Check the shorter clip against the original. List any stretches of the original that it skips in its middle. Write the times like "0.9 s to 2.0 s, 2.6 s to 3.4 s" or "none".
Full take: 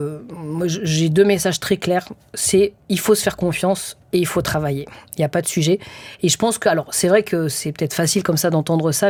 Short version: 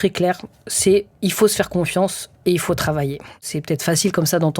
5.1 s to 7.5 s